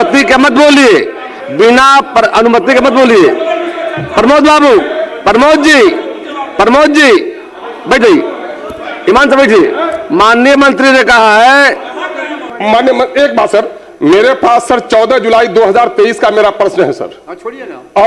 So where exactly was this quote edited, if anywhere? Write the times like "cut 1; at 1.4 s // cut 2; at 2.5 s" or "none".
cut 1; at 12.5 s